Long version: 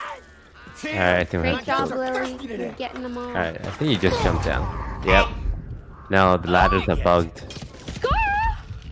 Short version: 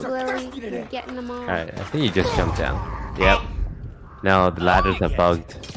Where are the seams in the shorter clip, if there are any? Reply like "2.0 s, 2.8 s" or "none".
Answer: none